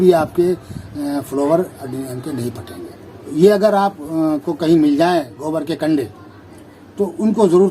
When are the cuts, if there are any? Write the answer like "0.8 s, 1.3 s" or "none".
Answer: 3.3 s

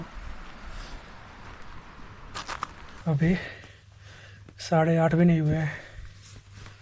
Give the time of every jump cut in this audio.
3.0 s

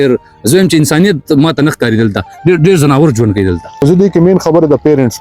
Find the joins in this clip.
3.7 s

